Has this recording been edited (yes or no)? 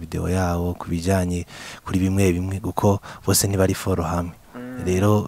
no